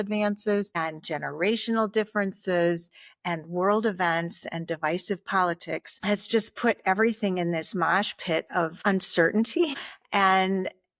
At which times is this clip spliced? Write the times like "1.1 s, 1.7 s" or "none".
8.8 s